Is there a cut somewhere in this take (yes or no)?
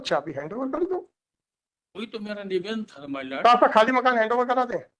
no